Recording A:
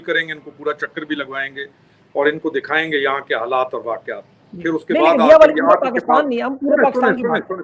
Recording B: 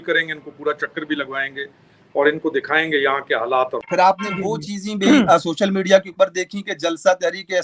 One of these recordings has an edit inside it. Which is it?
B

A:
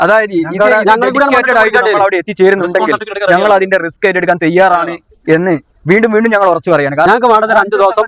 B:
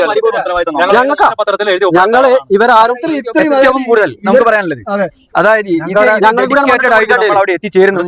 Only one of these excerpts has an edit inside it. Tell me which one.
A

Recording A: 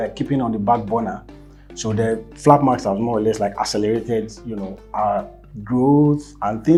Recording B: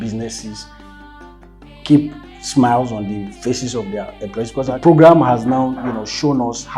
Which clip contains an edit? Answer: B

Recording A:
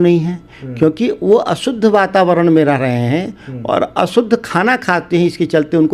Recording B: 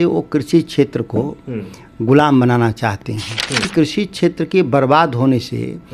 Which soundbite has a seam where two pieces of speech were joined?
B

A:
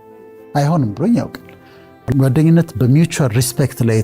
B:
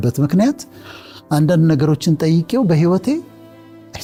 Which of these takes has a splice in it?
A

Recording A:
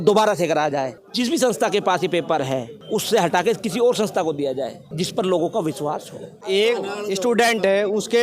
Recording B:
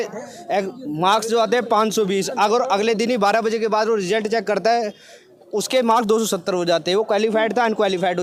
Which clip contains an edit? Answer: A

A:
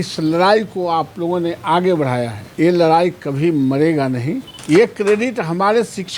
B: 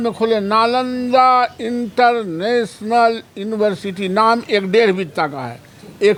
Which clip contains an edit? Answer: A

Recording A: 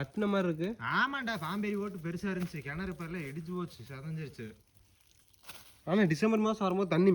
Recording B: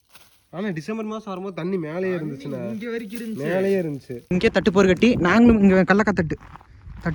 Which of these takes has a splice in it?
B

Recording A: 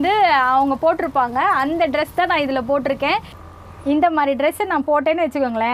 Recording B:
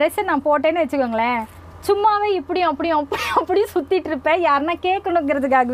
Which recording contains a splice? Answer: A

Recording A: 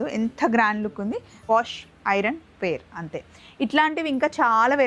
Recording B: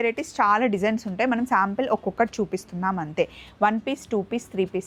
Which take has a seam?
A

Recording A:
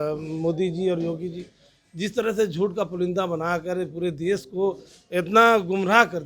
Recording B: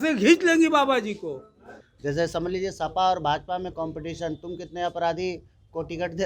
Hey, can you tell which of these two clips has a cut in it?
B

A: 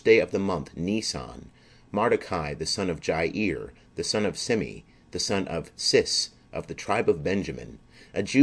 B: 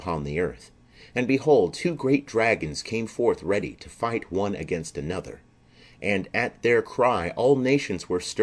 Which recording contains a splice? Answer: B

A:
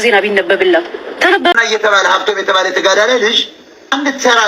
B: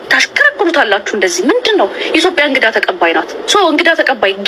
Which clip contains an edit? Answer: A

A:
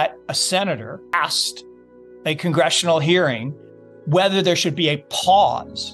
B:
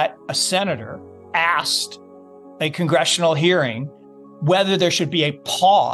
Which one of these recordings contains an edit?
A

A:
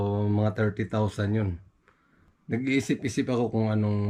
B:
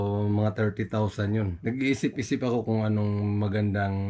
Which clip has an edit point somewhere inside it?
B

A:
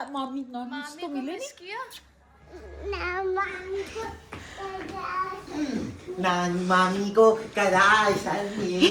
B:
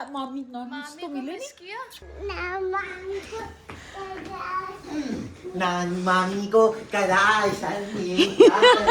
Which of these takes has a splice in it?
B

